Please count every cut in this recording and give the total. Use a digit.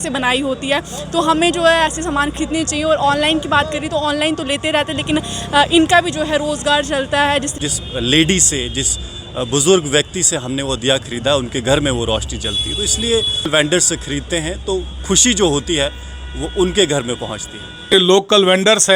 3